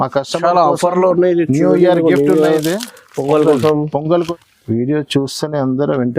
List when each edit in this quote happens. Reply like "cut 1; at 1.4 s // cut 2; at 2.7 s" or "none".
cut 1; at 4.1 s